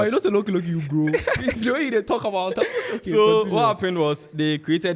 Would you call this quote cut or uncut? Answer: uncut